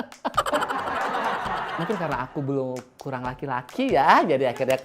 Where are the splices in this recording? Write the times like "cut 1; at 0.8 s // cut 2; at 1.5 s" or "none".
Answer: cut 1; at 1.8 s